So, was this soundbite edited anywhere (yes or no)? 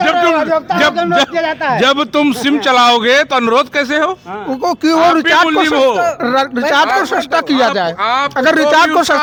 no